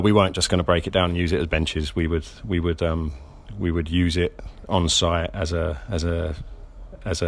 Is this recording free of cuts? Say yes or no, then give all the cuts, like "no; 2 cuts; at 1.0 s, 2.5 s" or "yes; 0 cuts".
yes; 0 cuts